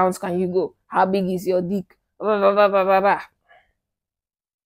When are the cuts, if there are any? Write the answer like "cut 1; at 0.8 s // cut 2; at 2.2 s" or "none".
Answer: none

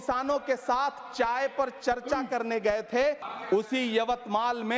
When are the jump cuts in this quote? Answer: cut 1; at 3.3 s

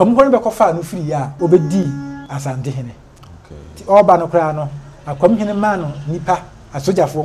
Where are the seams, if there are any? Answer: cut 1; at 1.3 s // cut 2; at 2.2 s

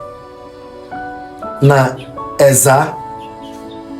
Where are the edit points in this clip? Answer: cut 1; at 2.9 s

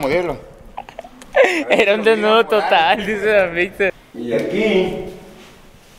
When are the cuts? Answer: cut 1; at 4.0 s

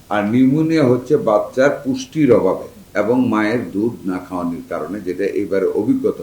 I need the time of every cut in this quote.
cut 1; at 2.8 s

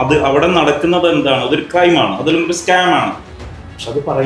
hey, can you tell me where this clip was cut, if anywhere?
none

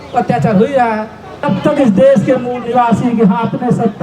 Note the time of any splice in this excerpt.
cut 1; at 1.5 s

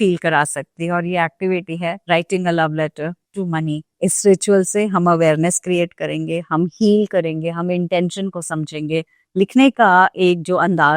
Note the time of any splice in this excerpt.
cut 1; at 3.9 s // cut 2; at 9.2 s

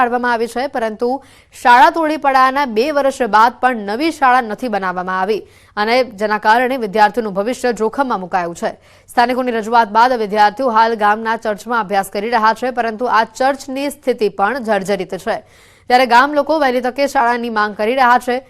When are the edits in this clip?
cut 1; at 7.7 s

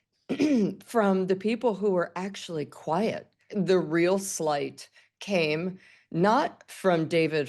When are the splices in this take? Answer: cut 1; at 3.4 s

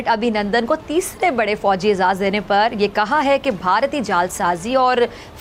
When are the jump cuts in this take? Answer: none

